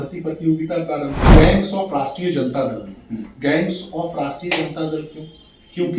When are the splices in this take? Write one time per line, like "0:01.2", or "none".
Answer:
0:01.2